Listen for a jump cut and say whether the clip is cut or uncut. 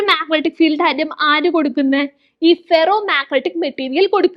uncut